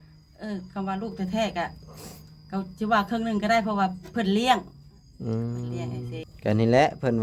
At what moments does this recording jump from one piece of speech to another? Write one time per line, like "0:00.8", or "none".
0:06.3

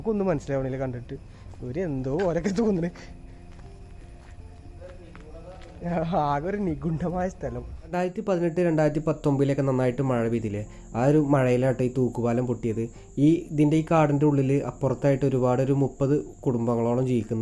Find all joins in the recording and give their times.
0:07.7

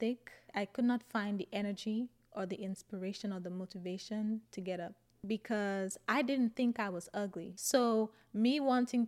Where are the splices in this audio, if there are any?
0:05.1
0:07.5

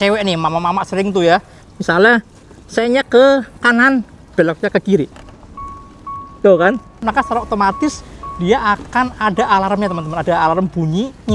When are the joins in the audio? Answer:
0:01.6
0:05.1
0:07.0

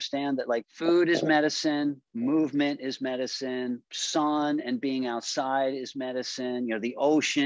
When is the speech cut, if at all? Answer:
none

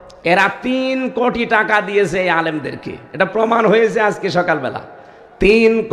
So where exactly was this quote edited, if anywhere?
none

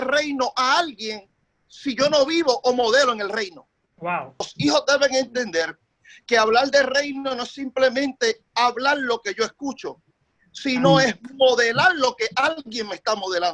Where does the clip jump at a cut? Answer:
0:04.5

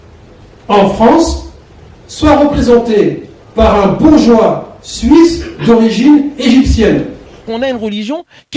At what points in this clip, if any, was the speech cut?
0:07.5

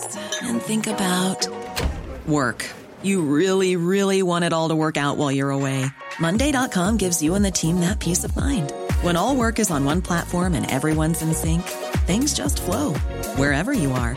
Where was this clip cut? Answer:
none

